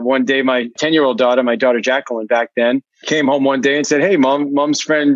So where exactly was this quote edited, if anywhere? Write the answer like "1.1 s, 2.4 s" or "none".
0.8 s, 2.9 s